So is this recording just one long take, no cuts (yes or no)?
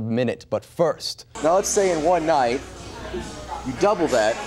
no